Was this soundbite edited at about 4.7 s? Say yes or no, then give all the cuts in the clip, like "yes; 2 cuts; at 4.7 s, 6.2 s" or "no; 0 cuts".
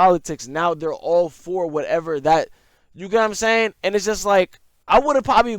yes; 1 cut; at 4.7 s